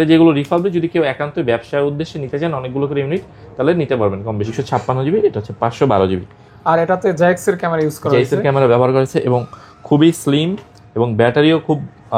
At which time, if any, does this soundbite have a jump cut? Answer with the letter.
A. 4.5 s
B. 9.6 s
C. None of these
A